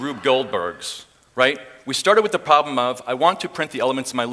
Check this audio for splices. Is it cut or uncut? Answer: uncut